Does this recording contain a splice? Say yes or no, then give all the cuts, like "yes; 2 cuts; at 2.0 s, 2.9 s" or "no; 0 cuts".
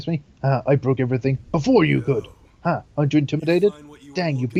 no; 0 cuts